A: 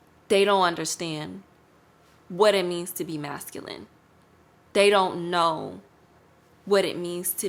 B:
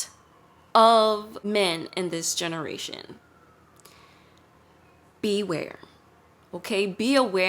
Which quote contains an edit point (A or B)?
B